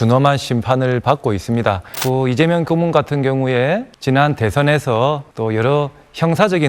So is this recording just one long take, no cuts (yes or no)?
no